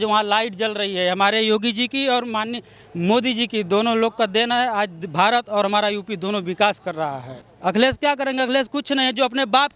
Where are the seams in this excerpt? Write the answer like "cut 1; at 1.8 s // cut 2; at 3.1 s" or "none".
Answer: cut 1; at 7.3 s